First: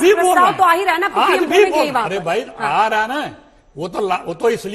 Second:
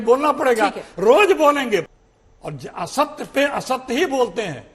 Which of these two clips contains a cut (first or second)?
second